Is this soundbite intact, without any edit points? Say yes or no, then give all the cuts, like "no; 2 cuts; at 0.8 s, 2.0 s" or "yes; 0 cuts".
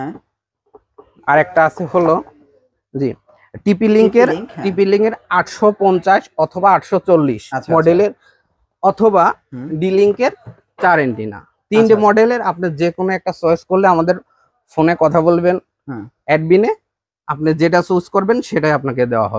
yes; 0 cuts